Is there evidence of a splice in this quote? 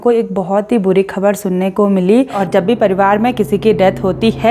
yes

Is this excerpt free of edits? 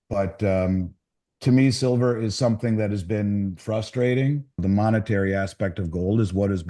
no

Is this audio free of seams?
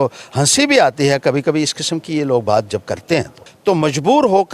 no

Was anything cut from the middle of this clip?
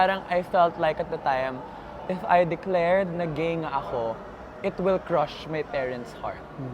no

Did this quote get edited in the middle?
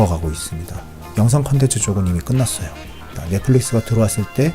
yes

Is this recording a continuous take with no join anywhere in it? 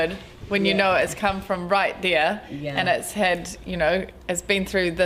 yes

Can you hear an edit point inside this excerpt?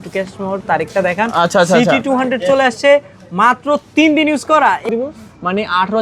yes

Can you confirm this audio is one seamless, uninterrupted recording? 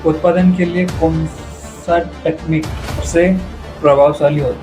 no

